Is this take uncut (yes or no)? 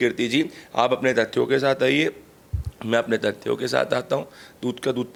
yes